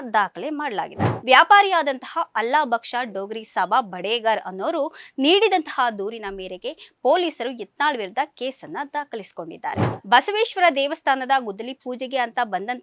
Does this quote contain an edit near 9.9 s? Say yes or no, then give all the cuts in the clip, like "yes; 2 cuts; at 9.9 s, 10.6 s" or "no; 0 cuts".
yes; 2 cuts; at 1.1 s, 9.9 s